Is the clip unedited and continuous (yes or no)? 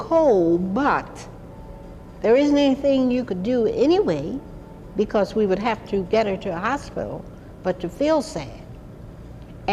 no